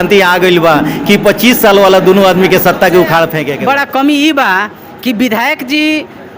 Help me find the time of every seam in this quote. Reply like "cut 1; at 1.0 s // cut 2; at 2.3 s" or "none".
cut 1; at 3.5 s